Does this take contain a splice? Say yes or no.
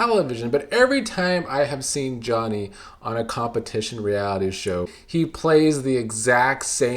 yes